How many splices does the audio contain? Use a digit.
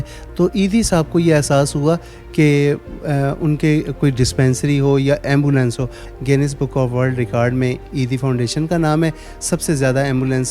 1